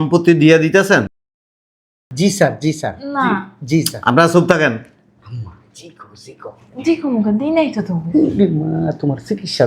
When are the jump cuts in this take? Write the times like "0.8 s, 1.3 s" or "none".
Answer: none